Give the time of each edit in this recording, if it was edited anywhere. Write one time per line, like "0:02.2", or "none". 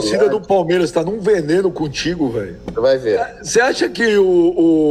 0:03.4